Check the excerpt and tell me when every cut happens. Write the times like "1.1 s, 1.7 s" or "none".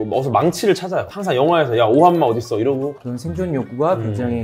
1.1 s, 3.0 s